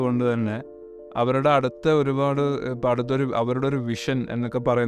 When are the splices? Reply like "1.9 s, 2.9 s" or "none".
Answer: none